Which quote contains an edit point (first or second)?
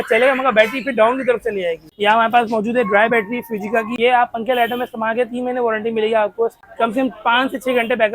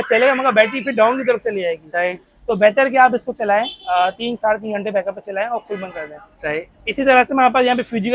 first